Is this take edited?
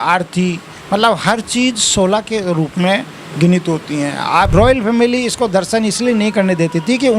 yes; 1 cut; at 4.5 s

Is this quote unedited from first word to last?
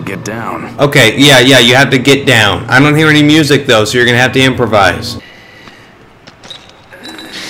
no; 1 cut; at 5.1 s

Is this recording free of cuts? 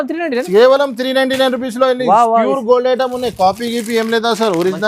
yes; 0 cuts

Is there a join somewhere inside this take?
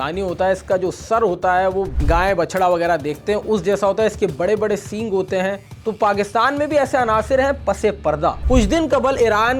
yes; 3 cuts; at 1.9 s, 5.7 s, 8.4 s

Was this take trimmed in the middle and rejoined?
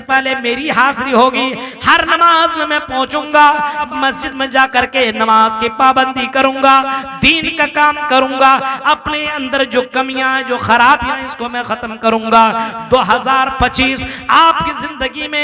yes; 1 cut; at 3.9 s

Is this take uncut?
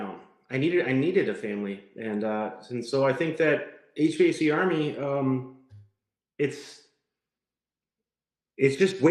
yes; 0 cuts

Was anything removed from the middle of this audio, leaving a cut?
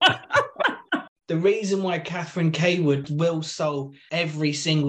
yes; 3 cuts; at 1.1 s, 3.0 s, 4.0 s

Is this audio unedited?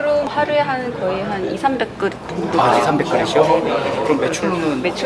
yes; 0 cuts

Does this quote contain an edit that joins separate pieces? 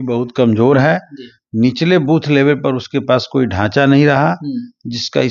no; 0 cuts

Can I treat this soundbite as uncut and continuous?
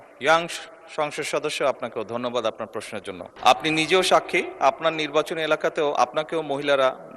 no; 1 cut; at 3.3 s

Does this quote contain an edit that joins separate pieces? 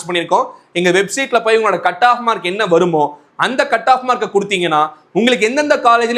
no; 0 cuts

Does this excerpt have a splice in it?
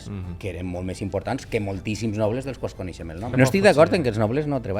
yes; 1 cut; at 3.3 s

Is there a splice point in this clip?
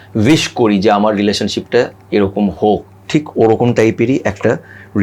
no; 0 cuts

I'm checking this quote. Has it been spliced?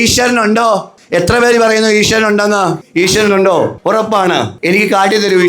yes; 3 cuts; at 1.0 s, 2.8 s, 4.2 s

